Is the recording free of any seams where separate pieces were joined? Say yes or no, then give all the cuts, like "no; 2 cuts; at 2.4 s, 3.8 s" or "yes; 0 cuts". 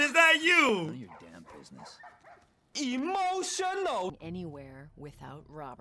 no; 1 cut; at 4.1 s